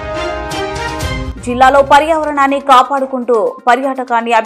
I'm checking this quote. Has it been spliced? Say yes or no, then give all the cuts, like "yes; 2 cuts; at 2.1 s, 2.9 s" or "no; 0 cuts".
yes; 1 cut; at 1.3 s